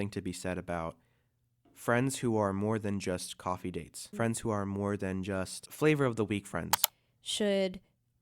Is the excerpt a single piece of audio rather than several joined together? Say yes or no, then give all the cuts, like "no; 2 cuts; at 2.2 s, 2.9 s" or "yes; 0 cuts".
no; 3 cuts; at 4.0 s, 5.6 s, 6.9 s